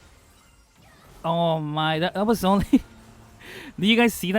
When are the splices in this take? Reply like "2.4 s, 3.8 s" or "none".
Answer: none